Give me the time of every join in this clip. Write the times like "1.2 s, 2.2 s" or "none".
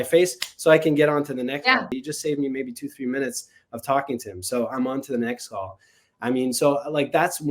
1.9 s